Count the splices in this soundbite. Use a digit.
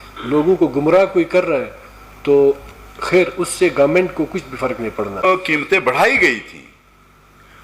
1